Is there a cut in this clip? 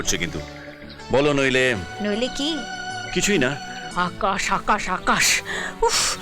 yes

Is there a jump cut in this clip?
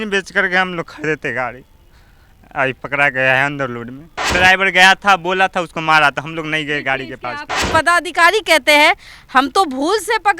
yes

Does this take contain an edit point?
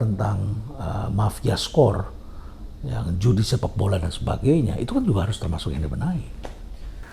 no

